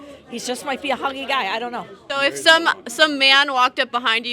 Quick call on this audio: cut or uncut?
cut